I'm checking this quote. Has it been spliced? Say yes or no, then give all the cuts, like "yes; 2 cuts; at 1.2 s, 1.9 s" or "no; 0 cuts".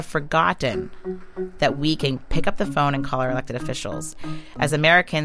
yes; 1 cut; at 4.1 s